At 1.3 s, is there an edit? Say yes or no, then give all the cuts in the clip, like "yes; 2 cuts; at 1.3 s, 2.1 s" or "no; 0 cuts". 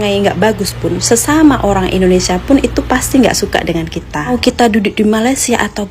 no; 1 cut; at 4.3 s